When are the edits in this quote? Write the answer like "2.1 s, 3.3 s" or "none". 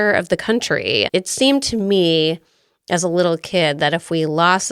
1.1 s